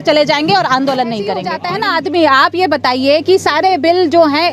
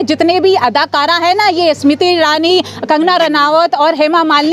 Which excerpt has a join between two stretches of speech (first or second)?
first